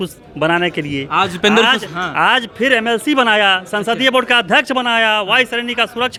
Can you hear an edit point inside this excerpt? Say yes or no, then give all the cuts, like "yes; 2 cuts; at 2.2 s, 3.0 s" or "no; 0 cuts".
no; 0 cuts